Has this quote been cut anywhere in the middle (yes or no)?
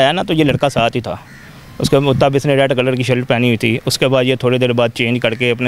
no